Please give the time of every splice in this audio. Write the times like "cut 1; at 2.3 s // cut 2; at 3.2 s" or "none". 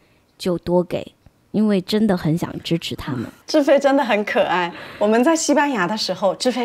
cut 1; at 3.4 s

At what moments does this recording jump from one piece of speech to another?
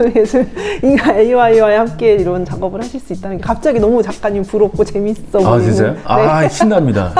none

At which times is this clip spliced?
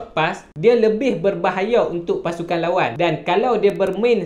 cut 1; at 2.9 s

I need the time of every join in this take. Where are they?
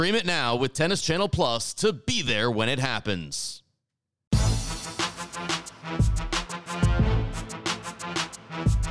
cut 1; at 4.3 s

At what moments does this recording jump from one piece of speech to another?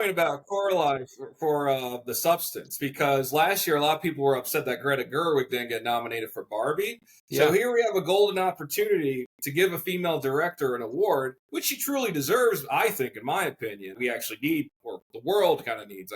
cut 1; at 13.9 s // cut 2; at 14.7 s

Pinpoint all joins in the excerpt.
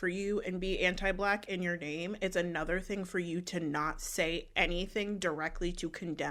none

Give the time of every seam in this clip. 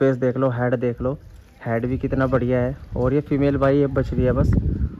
none

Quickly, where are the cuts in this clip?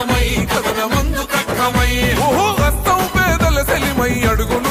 none

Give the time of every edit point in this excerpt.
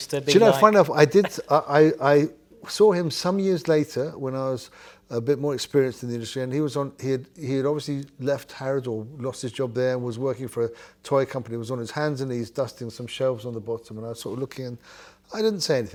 none

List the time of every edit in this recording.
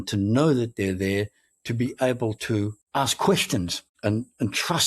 cut 1; at 2.8 s // cut 2; at 3.8 s

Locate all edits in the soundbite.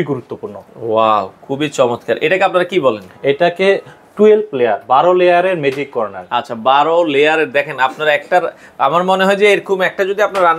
none

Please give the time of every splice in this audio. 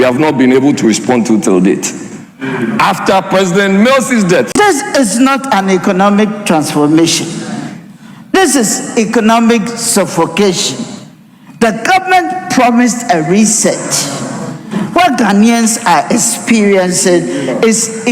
cut 1; at 4.5 s

